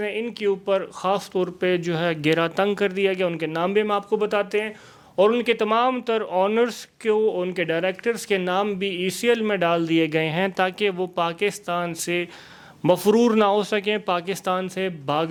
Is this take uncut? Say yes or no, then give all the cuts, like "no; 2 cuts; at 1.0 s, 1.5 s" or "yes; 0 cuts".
yes; 0 cuts